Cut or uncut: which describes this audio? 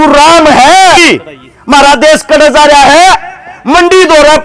cut